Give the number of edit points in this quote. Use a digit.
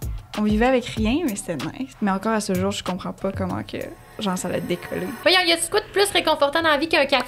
2